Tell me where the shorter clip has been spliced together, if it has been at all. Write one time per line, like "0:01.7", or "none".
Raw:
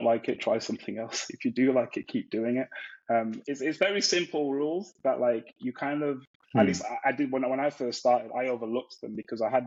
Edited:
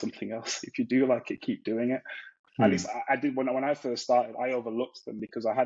0:02.3